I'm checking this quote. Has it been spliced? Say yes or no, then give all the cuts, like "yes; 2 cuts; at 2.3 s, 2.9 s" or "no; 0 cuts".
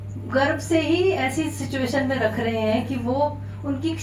no; 0 cuts